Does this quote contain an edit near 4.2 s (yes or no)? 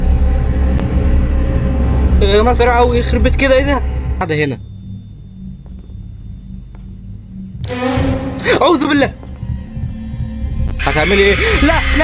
yes